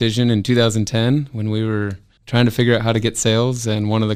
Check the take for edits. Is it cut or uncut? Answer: uncut